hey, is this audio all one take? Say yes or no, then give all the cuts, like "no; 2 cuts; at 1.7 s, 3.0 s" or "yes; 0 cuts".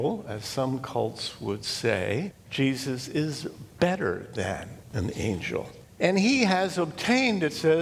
no; 3 cuts; at 2.4 s, 4.8 s, 5.8 s